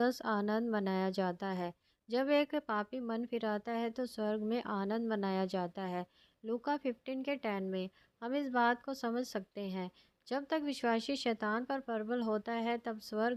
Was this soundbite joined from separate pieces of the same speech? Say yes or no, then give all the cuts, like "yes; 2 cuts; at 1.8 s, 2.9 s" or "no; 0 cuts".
no; 0 cuts